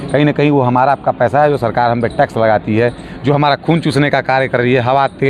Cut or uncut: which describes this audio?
uncut